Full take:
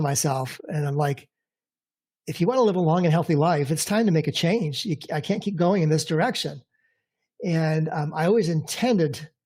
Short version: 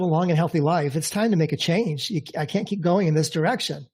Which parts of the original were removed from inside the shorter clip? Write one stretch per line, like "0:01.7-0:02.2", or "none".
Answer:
none

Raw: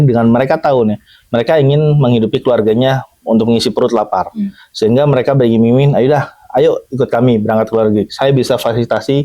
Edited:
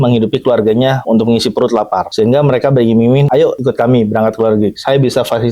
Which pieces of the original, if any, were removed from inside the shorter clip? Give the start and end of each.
0:03.0-0:03.2
0:04.3-0:04.7
0:06.0-0:06.7

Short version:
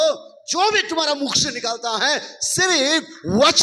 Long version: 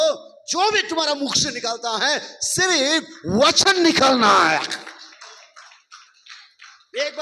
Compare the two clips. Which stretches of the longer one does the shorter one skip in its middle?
none

